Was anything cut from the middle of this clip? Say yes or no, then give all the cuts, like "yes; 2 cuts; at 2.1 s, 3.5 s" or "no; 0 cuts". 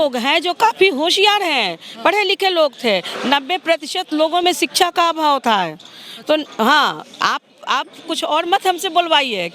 no; 0 cuts